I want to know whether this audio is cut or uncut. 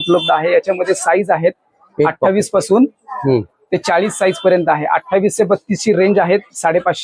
uncut